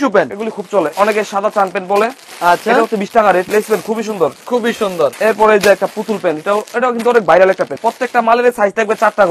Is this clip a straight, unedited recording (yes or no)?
no